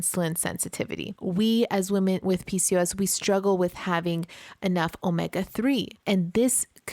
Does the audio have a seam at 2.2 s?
yes; 3 cuts; at 1.1 s, 2.2 s, 5.9 s

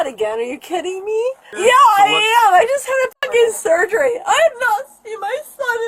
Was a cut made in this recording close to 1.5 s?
yes; 1 cut; at 1.5 s

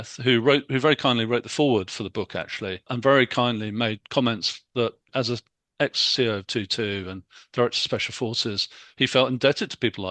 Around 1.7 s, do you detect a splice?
no; 2 cuts; at 2.9 s, 5.1 s

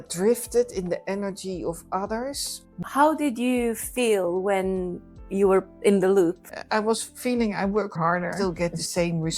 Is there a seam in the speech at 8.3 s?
yes; 3 cuts; at 2.8 s, 6.5 s, 8.3 s

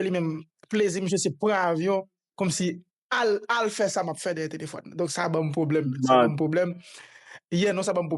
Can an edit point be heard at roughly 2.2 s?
no; 0 cuts

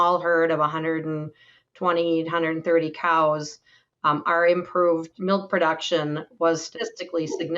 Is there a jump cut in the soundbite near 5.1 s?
yes; 2 cuts; at 5.1 s, 6.7 s

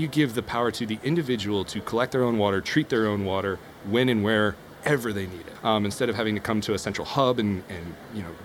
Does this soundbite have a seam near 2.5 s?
no; 1 cut; at 5.6 s

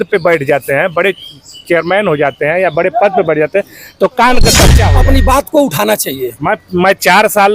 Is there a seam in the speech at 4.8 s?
yes; 1 cut; at 4.8 s

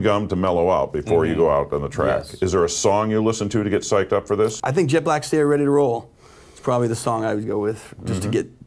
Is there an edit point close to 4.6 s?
yes; 1 cut; at 4.6 s

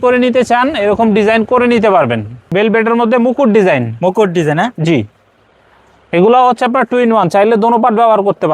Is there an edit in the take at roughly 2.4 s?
yes; 1 cut; at 2.4 s

